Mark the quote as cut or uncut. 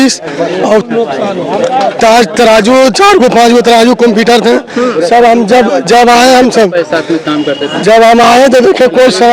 uncut